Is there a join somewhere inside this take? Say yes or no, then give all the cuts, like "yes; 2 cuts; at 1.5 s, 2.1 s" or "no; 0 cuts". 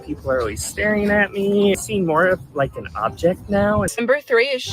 yes; 2 cuts; at 1.8 s, 3.9 s